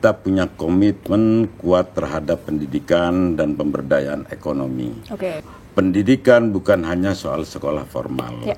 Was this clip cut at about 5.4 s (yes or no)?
yes